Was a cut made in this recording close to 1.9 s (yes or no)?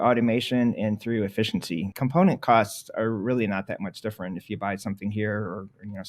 yes